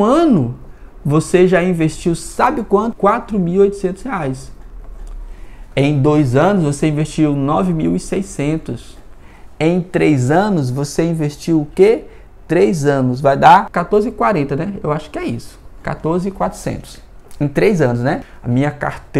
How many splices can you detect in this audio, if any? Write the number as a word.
three